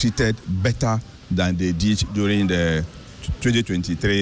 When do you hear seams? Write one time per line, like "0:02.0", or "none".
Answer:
none

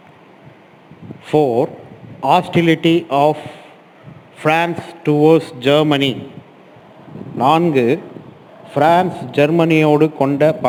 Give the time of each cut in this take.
none

